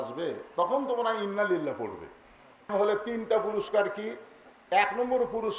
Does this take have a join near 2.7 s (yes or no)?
yes